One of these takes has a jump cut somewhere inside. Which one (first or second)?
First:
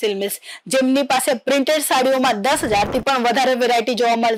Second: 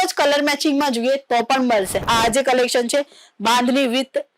second